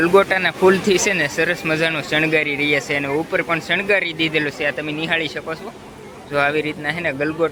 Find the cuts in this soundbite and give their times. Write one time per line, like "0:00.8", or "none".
none

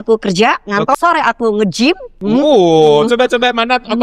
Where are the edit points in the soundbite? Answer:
0:00.9
0:02.2

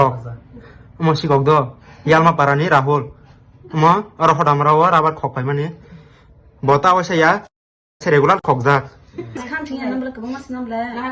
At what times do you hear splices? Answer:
0:09.4

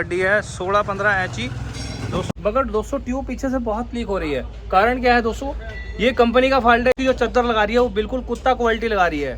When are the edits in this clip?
0:02.3
0:07.0

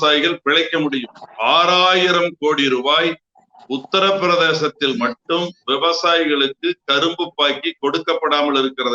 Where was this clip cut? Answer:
none

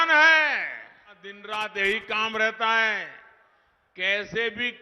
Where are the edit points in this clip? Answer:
0:01.3

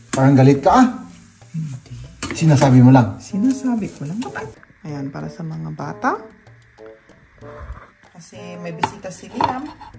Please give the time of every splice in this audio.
0:04.2

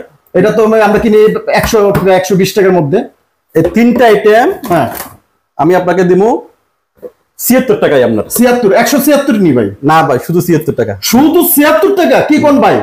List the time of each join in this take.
none

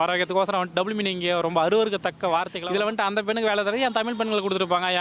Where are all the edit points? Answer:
0:02.6

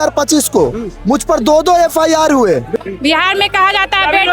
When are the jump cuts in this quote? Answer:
0:02.7

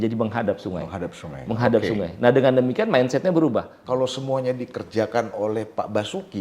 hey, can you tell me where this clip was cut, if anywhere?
0:03.7

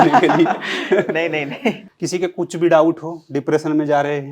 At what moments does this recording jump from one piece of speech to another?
0:01.9

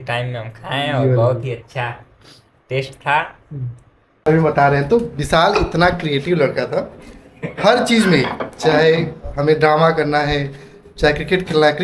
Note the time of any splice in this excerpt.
0:04.3

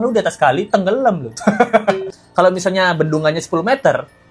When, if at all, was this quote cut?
0:02.1

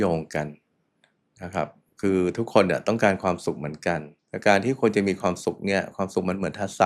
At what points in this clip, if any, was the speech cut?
0:04.1

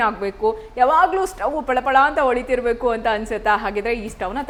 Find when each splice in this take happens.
none

